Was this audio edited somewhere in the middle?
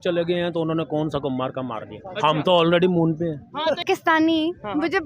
yes; 1 cut; at 3.8 s

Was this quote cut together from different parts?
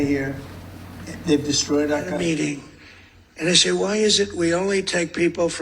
yes; 1 cut; at 2.2 s

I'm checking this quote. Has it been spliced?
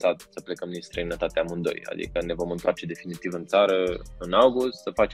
no; 0 cuts

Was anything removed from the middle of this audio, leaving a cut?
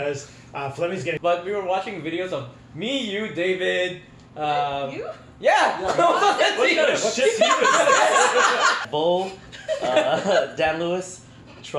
yes; 2 cuts; at 1.2 s, 8.8 s

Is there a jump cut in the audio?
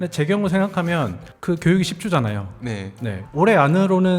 yes; 1 cut; at 3.1 s

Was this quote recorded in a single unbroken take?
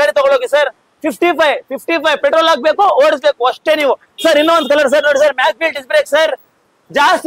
yes; 0 cuts

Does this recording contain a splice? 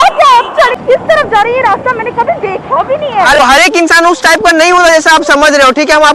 yes; 2 cuts; at 0.8 s, 3.4 s

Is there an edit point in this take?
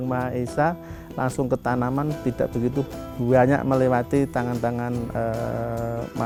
no; 0 cuts

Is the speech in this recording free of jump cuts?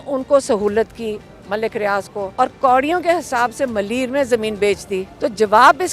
no; 2 cuts; at 2.3 s, 5.1 s

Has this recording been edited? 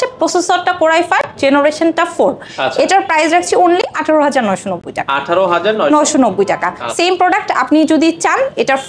no; 0 cuts

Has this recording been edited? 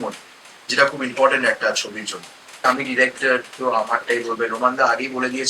yes; 1 cut; at 2.6 s

